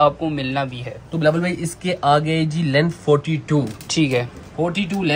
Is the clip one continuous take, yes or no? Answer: yes